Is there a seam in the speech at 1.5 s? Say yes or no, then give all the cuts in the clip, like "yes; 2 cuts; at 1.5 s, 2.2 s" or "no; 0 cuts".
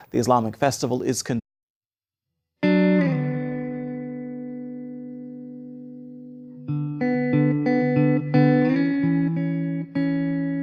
no; 0 cuts